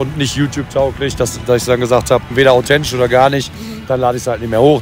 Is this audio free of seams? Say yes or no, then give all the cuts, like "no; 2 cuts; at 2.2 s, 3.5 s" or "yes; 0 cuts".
no; 1 cut; at 2.3 s